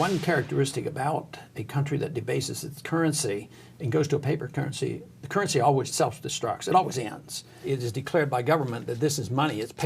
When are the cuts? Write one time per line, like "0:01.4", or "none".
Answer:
0:05.9
0:07.6

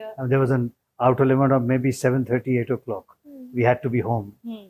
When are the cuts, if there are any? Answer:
none

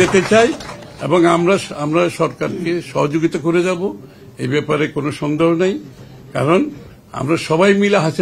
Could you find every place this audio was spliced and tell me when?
none

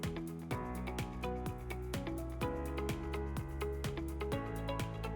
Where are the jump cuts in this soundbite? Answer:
none

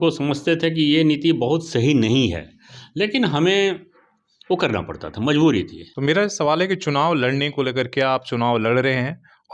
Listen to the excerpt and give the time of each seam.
0:05.8

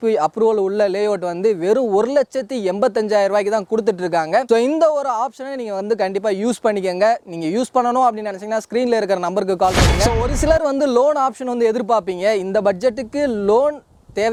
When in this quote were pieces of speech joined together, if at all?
none

